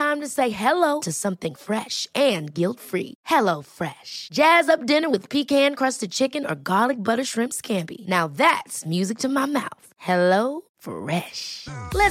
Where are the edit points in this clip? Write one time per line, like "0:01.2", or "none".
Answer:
none